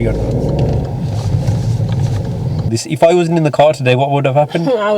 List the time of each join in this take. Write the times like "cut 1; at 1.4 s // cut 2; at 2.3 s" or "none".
cut 1; at 2.7 s

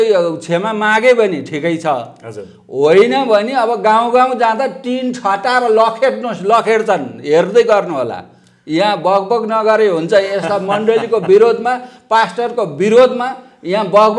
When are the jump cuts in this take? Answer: none

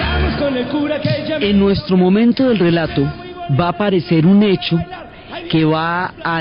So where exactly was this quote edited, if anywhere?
none

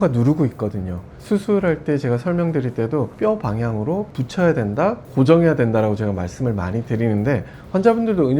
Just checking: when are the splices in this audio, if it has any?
cut 1; at 1.1 s // cut 2; at 3.1 s // cut 3; at 4.1 s

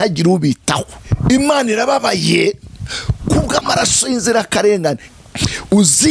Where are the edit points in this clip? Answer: cut 1; at 1.0 s // cut 2; at 5.1 s

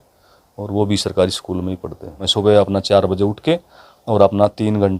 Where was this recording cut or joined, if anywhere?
cut 1; at 2.3 s

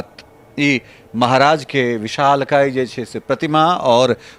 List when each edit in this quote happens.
none

